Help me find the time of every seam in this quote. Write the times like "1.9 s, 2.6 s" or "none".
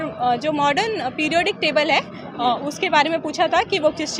none